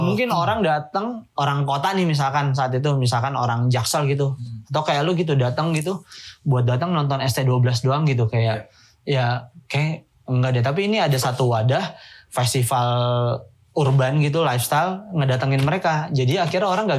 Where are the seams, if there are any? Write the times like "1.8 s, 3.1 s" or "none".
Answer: 1.2 s